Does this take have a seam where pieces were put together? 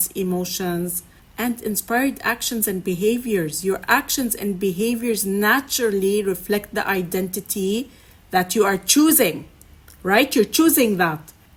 no; 0 cuts

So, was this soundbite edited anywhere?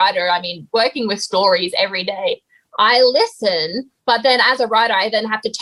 no; 0 cuts

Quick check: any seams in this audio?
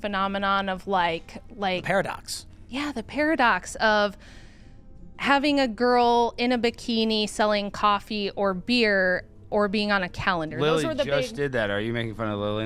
no; 0 cuts

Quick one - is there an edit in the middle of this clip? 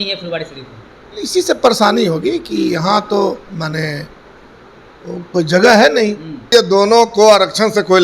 yes; 1 cut; at 6.5 s

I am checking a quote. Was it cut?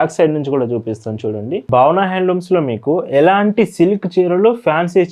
yes; 1 cut; at 1.6 s

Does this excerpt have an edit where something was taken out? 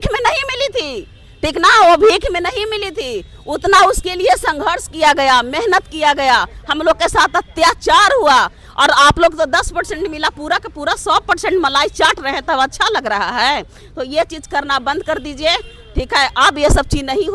no; 0 cuts

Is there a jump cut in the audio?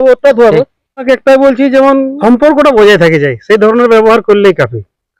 yes; 2 cuts; at 1.0 s, 2.1 s

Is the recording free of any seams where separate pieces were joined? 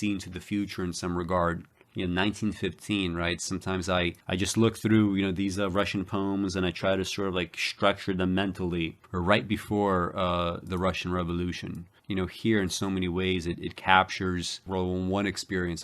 yes; 0 cuts

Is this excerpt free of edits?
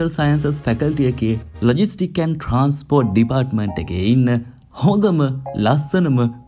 yes; 0 cuts

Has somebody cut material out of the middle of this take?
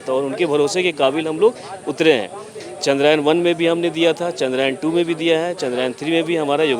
no; 0 cuts

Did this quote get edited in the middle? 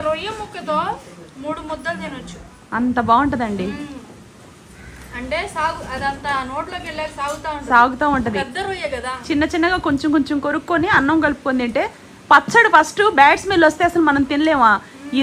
no; 0 cuts

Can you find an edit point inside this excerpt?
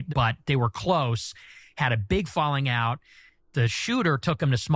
no; 0 cuts

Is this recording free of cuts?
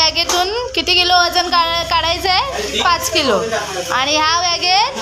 yes; 0 cuts

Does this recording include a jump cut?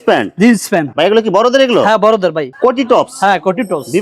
yes; 1 cut; at 2.5 s

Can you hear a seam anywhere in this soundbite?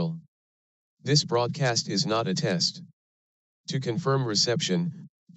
no; 0 cuts

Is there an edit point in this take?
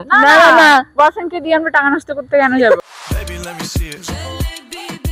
no; 0 cuts

